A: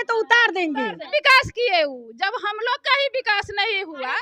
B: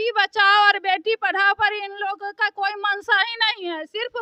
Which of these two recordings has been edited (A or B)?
A